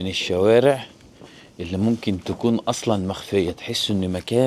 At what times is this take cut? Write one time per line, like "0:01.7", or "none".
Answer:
none